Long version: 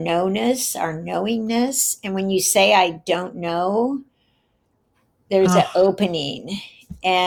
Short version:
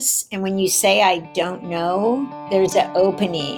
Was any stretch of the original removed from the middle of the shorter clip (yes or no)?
yes